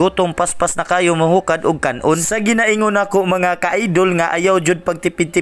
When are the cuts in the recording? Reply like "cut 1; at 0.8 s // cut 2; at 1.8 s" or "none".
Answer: none